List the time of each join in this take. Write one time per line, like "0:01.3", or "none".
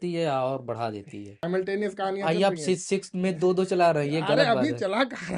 0:01.4